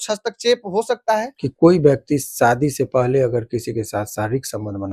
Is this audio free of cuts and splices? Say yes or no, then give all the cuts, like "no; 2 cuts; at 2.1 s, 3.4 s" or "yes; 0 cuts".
no; 1 cut; at 1.3 s